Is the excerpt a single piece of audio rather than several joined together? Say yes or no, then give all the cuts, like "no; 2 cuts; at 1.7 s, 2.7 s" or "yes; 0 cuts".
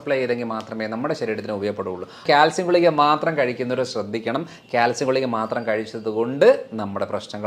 no; 1 cut; at 2.2 s